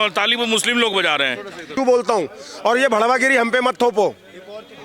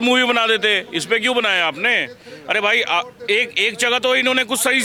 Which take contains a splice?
first; 1 cut; at 1.7 s

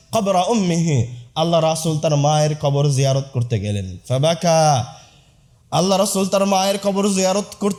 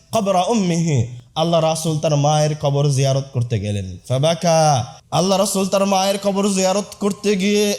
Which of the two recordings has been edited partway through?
second; 1 cut; at 5.0 s

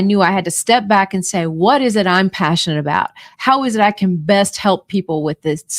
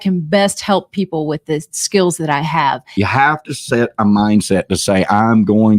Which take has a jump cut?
second; 1 cut; at 2.9 s

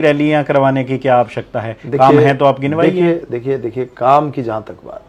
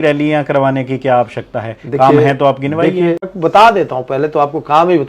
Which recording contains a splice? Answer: second; 1 cut; at 3.3 s

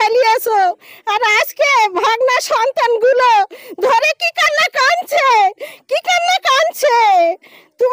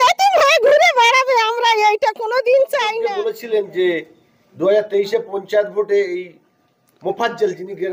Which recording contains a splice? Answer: second; 1 cut; at 3.0 s

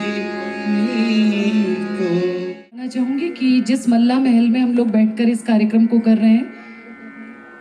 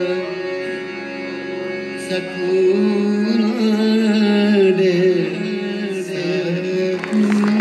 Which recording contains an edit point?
first; 1 cut; at 2.9 s

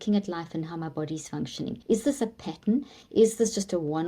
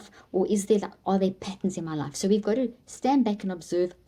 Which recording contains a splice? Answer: first; 1 cut; at 1.8 s

